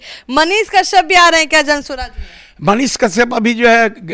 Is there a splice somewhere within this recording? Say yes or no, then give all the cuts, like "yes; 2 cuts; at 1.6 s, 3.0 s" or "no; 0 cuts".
no; 0 cuts